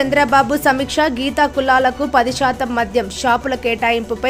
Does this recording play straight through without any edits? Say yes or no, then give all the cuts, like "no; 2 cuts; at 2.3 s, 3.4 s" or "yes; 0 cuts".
yes; 0 cuts